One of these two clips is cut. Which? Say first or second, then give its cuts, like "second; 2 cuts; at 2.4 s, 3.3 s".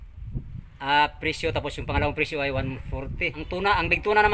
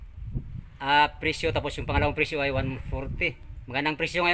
first; 1 cut; at 3.3 s